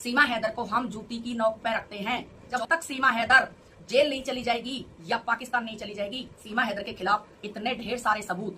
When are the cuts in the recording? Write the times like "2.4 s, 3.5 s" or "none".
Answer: 2.5 s, 6.4 s